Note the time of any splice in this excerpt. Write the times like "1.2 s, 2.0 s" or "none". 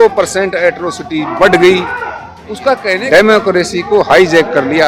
2.9 s